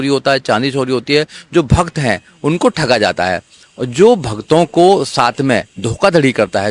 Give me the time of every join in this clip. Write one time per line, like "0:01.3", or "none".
none